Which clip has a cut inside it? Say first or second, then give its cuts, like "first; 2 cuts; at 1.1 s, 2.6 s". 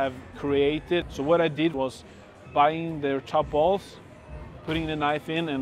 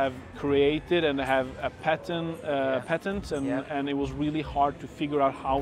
first; 2 cuts; at 1.0 s, 1.7 s